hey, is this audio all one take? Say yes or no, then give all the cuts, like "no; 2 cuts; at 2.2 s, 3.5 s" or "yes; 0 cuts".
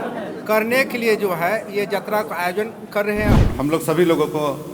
no; 1 cut; at 3.4 s